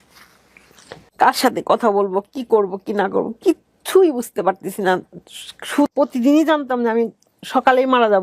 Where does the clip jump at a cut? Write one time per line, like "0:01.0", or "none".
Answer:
0:05.9